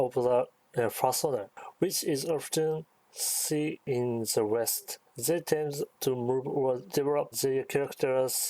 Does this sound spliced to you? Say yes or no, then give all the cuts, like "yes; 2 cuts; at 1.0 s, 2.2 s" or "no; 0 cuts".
yes; 4 cuts; at 3.8 s, 4.8 s, 5.9 s, 7.0 s